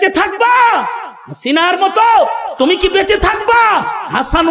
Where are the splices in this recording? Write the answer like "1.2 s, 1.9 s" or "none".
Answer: none

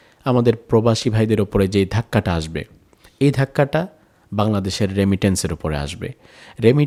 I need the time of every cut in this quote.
none

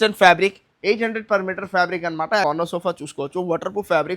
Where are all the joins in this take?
2.4 s

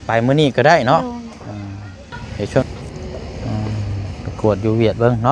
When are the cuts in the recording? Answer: 2.6 s

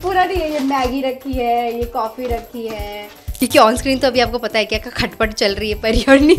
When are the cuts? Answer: 3.3 s

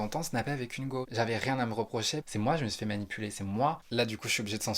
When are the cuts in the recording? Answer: 1.1 s, 2.3 s, 3.8 s

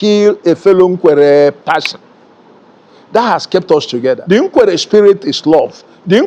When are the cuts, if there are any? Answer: 4.2 s

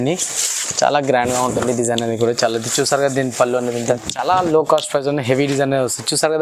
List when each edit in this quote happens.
3.8 s

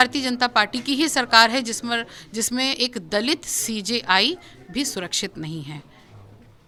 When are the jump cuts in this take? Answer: none

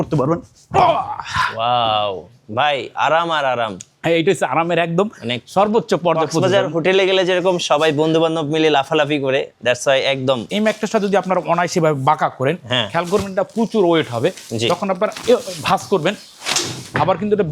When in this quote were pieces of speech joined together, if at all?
10.5 s

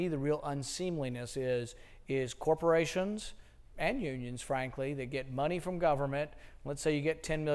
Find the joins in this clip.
2.7 s

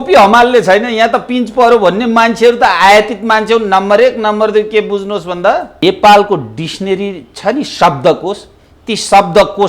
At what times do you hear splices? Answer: 5.8 s

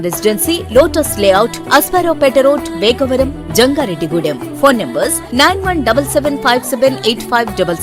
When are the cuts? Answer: none

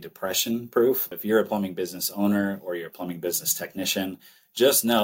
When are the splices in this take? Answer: 1.1 s

